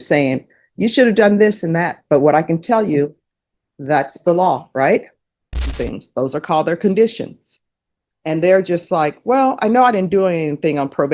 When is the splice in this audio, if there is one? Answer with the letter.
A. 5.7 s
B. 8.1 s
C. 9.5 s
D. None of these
A